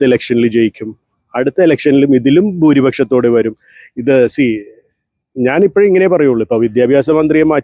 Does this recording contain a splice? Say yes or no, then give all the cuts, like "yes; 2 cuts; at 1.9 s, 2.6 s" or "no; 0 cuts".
no; 0 cuts